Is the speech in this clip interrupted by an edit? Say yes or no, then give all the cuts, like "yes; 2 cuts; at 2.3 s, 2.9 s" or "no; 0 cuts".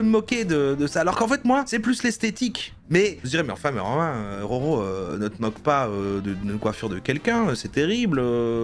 yes; 1 cut; at 2.8 s